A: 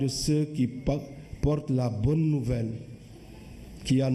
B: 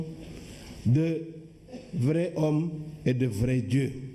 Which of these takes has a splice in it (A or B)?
B